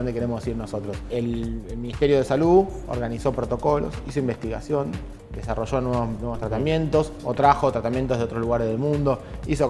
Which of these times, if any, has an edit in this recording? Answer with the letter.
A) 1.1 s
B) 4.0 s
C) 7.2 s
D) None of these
A